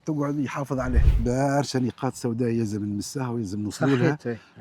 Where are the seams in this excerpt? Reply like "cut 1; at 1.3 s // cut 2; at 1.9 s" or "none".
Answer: cut 1; at 1.2 s